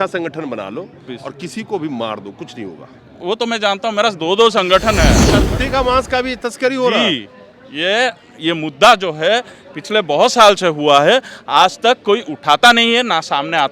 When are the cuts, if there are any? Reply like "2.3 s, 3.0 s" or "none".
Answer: 5.3 s